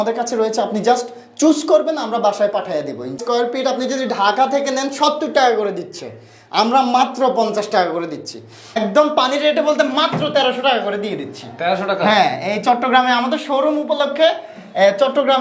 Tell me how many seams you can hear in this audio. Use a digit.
2